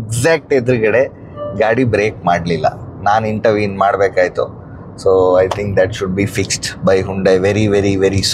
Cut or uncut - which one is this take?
uncut